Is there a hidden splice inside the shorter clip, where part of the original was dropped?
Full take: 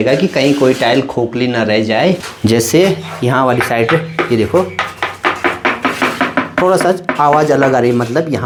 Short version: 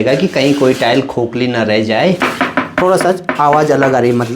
yes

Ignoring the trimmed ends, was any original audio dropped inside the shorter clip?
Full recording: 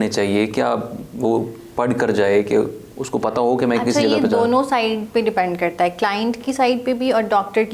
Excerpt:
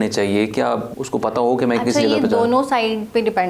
yes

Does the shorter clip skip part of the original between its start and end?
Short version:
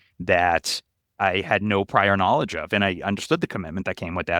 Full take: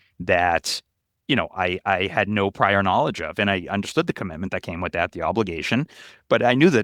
yes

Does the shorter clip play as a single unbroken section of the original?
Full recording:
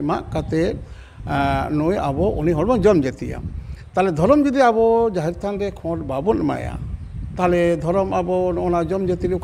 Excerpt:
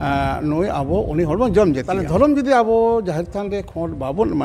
no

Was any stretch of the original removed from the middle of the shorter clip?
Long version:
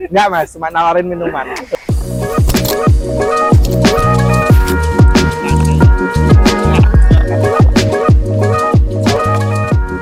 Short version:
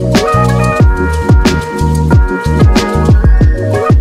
no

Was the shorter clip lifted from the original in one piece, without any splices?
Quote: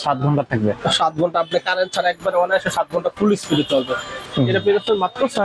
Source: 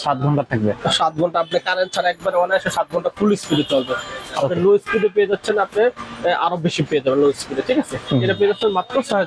no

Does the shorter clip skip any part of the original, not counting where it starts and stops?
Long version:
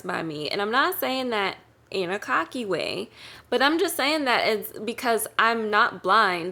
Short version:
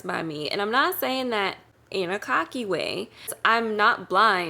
yes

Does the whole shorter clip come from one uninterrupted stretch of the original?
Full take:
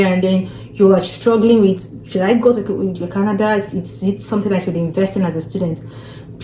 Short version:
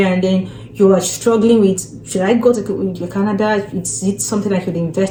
yes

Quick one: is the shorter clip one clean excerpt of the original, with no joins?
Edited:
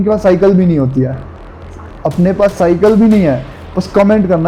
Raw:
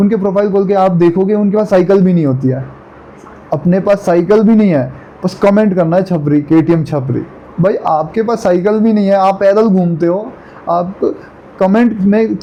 yes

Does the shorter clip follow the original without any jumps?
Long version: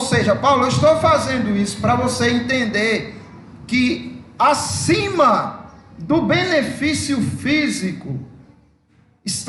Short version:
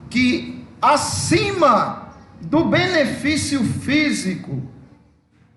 yes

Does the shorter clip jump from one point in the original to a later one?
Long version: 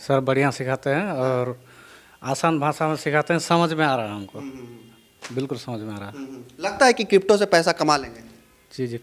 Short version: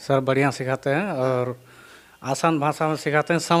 no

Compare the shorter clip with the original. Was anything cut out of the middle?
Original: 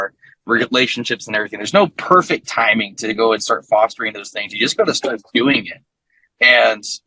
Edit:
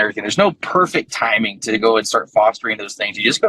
no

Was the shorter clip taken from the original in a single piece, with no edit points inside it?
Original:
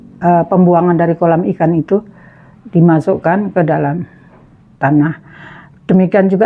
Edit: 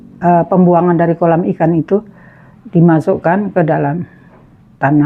yes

